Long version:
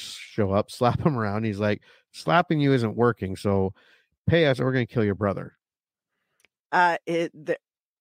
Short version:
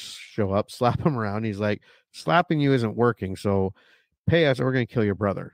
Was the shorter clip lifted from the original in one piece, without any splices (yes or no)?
yes